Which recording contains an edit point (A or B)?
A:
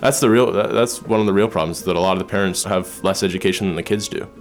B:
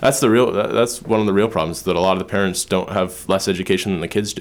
A